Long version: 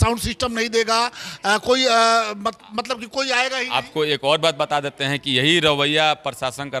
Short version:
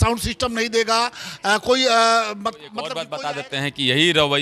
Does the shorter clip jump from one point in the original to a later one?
yes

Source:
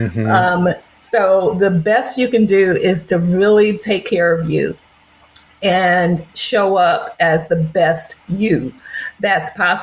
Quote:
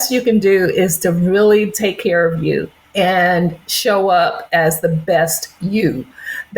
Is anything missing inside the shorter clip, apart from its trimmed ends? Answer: yes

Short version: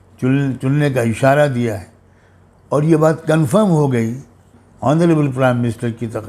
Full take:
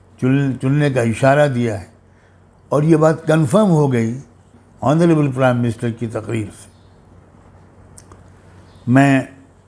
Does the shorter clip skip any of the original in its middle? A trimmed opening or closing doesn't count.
no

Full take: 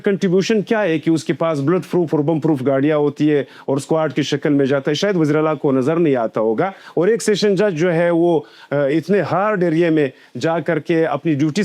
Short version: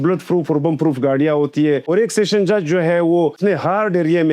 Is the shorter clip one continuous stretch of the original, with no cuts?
no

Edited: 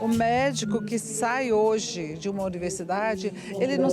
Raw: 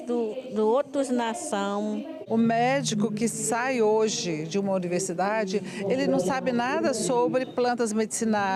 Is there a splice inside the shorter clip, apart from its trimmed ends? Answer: no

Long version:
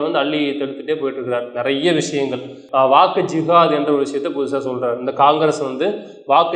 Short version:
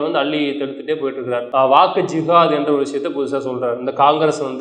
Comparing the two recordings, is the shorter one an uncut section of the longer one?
no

